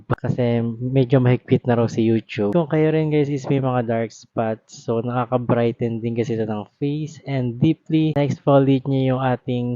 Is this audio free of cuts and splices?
no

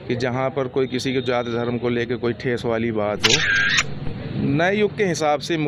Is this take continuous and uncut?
yes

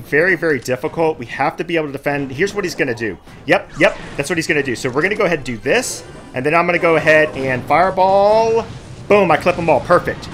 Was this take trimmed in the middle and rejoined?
no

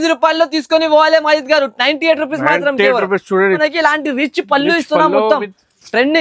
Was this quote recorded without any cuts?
no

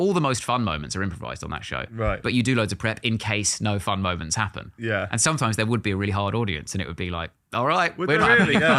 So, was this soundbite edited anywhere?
no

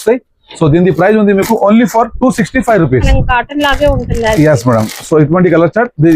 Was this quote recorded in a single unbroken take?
no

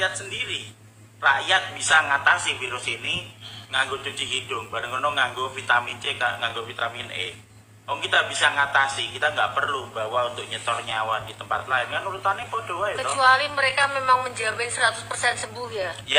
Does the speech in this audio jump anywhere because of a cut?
no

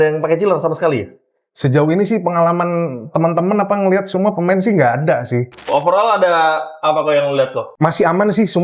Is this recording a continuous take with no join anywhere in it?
no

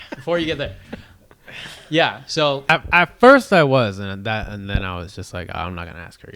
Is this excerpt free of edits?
no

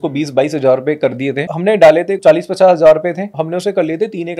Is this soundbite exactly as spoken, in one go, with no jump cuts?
no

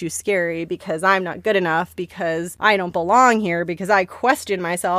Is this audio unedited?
no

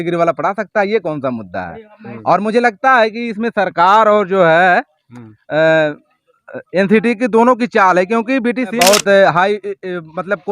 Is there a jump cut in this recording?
yes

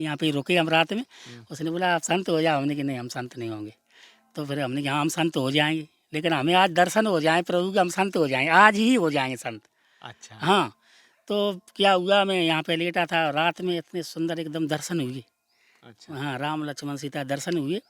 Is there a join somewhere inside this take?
no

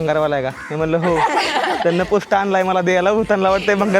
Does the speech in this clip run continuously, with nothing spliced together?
yes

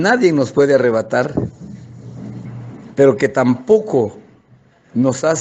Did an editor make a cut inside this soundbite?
yes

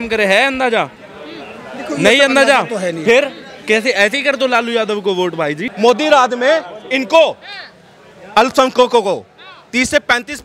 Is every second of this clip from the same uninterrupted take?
no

